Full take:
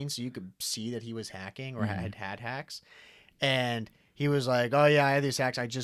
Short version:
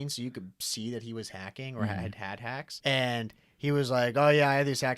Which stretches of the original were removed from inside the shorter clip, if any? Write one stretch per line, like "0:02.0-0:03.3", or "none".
0:02.7-0:03.3

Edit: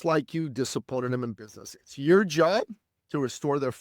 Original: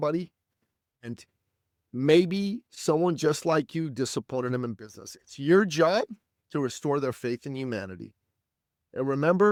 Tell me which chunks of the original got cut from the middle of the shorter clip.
none

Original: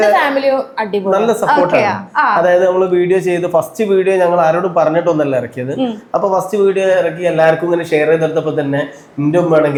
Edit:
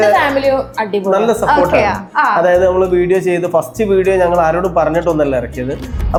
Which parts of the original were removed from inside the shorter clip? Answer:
none

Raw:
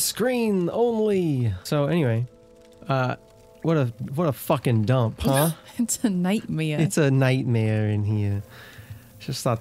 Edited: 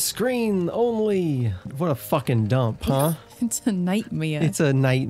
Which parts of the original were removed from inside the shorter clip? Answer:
0:01.6-0:04.0

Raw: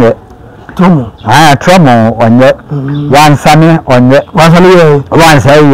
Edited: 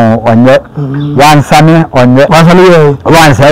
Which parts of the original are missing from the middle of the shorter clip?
0:04.2-0:04.4

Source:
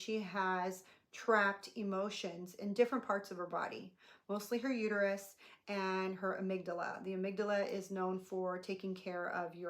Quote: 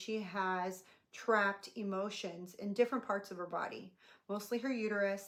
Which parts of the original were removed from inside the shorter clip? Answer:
none

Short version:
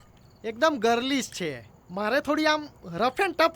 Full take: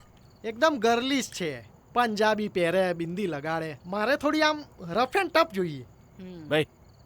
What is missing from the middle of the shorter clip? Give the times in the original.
0:01.8-0:03.7

